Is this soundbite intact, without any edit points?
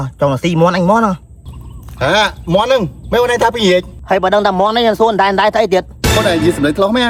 yes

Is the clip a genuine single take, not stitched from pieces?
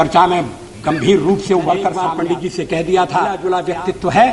no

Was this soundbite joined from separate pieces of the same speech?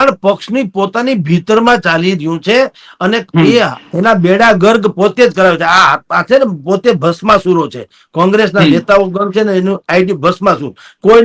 no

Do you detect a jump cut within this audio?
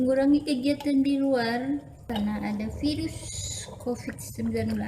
yes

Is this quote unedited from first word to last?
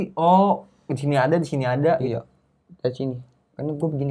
yes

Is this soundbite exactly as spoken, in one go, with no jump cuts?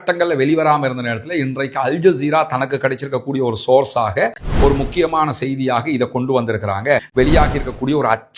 no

